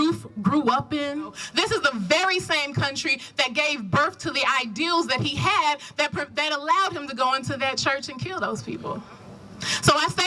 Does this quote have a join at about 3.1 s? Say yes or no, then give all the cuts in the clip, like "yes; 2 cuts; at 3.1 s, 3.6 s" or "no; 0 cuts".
no; 2 cuts; at 1.4 s, 9.1 s